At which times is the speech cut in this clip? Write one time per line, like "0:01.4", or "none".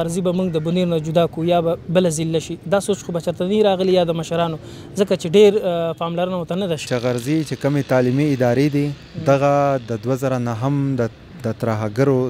0:06.8